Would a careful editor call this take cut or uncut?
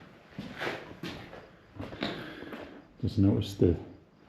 cut